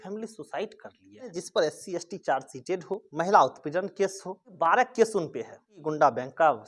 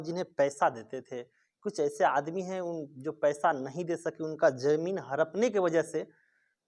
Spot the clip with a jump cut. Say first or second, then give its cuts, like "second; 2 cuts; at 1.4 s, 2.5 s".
first; 4 cuts; at 1.4 s, 3.1 s, 4.5 s, 5.8 s